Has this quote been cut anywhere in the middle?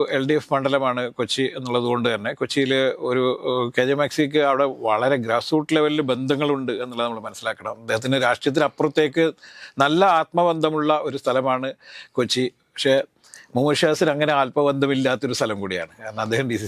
no; 0 cuts

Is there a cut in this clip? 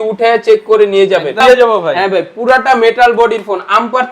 yes; 1 cut; at 1.4 s

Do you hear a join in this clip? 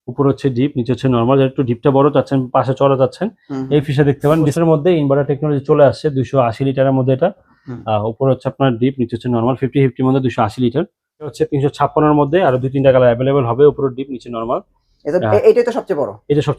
yes; 2 cuts; at 4.5 s, 11.3 s

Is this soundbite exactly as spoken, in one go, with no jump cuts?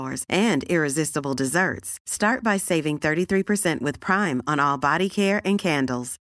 yes; 0 cuts

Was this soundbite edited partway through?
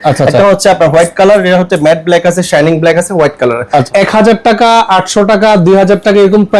yes; 1 cut; at 3.9 s

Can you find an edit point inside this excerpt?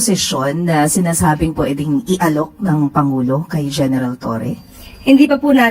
no; 0 cuts

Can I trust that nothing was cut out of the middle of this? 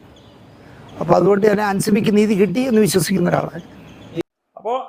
yes; 0 cuts

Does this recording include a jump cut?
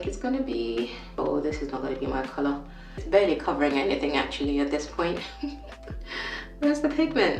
yes; 2 cuts; at 1.1 s, 3.0 s

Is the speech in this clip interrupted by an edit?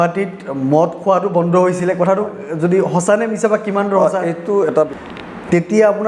yes; 1 cut; at 4.9 s

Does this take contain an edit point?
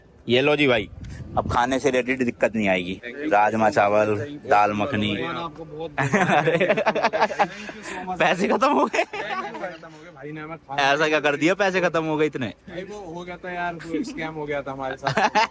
no; 0 cuts

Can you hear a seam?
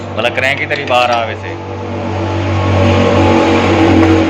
no; 0 cuts

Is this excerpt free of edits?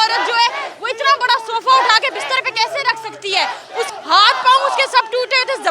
no; 1 cut; at 3.9 s

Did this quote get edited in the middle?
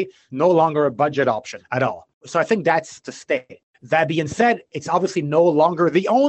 no; 0 cuts

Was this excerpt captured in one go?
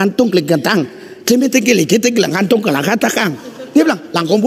no; 2 cuts; at 1.1 s, 3.3 s

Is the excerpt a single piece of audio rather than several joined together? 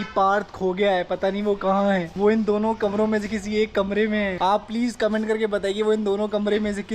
no; 2 cuts; at 2.1 s, 4.3 s

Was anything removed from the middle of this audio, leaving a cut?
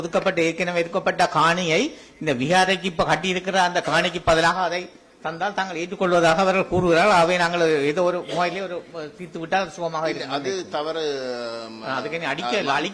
no; 0 cuts

